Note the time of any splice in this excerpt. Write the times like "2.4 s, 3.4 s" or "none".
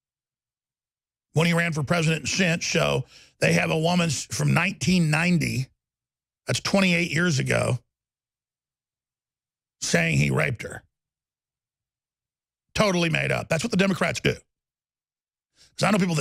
none